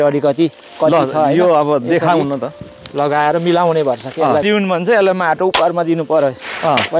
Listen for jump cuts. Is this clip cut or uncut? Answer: cut